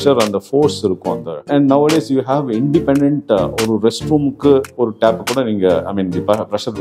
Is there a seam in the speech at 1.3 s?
yes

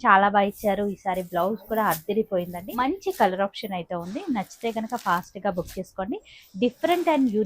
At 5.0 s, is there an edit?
no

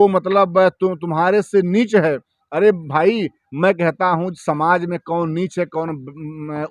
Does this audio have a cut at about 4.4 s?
no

